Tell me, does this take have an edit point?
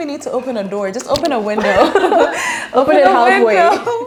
no; 0 cuts

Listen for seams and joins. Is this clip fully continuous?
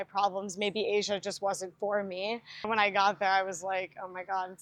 yes; 0 cuts

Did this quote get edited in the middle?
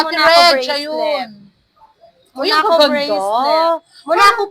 no; 0 cuts

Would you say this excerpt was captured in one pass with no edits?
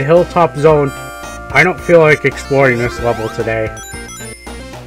no; 1 cut; at 3.7 s

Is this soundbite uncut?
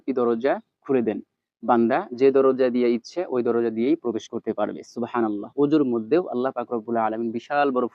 yes; 0 cuts

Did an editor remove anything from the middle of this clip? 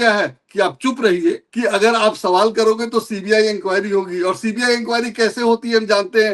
yes; 1 cut; at 1.5 s

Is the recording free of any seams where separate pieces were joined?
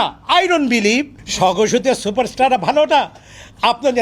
no; 1 cut; at 1.2 s

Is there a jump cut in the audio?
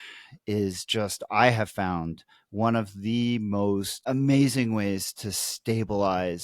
yes; 1 cut; at 4.0 s

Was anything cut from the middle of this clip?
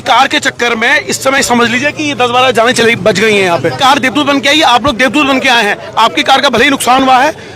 yes; 1 cut; at 3.8 s

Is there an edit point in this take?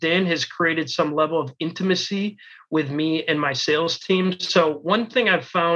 no; 0 cuts

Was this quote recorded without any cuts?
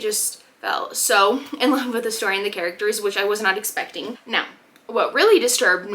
no; 1 cut; at 4.2 s

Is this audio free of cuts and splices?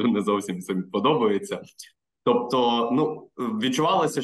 yes; 0 cuts

